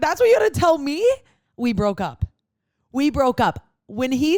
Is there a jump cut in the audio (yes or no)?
no